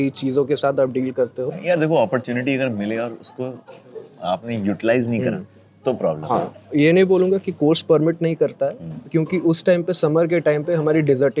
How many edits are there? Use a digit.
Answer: 2